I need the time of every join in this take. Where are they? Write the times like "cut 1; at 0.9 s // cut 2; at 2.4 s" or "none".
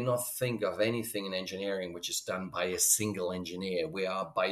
none